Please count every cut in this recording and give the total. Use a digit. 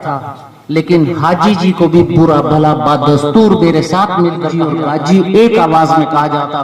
1